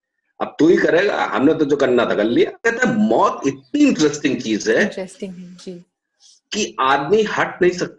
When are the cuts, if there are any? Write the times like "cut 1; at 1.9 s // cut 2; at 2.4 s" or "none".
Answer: cut 1; at 2.6 s